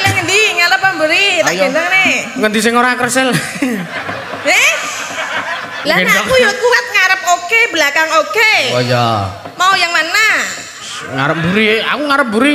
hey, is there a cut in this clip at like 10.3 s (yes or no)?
no